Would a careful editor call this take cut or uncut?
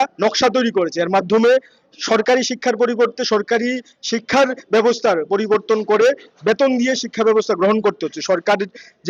uncut